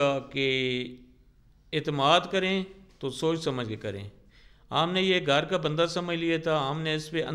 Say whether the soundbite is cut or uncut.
uncut